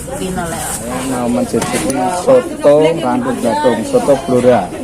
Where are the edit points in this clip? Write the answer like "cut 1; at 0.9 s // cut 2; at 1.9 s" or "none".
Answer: cut 1; at 1.0 s